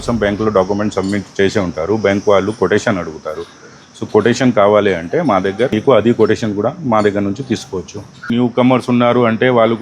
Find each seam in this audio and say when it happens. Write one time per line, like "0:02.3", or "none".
0:05.7
0:08.3